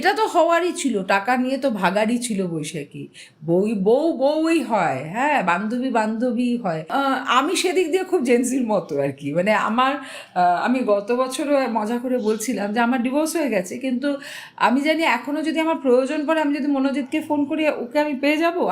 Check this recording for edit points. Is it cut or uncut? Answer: cut